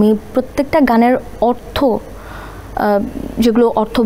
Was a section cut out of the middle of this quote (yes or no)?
no